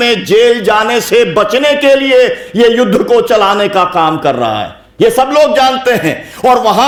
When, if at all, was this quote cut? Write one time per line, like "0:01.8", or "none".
none